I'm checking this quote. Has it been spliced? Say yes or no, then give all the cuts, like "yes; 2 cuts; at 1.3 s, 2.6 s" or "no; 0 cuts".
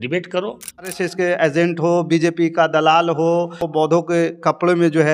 yes; 2 cuts; at 0.9 s, 3.6 s